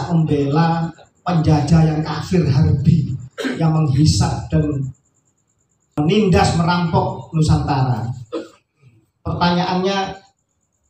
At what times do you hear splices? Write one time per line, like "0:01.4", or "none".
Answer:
0:06.0